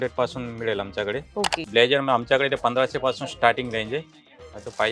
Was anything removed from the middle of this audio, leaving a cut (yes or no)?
yes